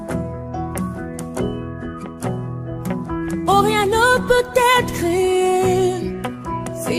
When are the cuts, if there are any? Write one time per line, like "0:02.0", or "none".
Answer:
none